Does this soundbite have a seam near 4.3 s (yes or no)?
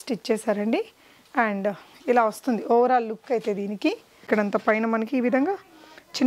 yes